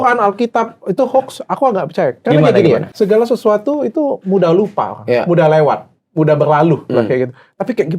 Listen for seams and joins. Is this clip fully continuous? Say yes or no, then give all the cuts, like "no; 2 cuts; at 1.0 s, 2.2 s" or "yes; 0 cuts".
no; 1 cut; at 2.9 s